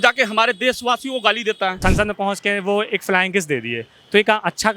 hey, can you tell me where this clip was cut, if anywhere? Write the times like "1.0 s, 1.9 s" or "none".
1.8 s